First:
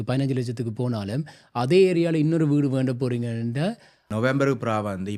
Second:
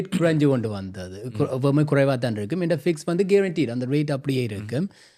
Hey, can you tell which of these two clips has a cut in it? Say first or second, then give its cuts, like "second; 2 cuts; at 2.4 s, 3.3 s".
first; 1 cut; at 3.9 s